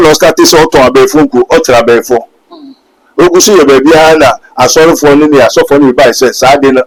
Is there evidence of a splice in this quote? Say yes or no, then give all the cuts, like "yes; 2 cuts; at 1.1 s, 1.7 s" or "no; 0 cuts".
no; 0 cuts